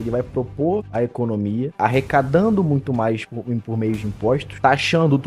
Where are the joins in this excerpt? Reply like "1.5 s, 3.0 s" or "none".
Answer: none